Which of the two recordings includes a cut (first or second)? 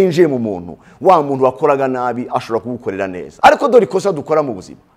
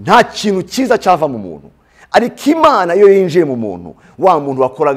first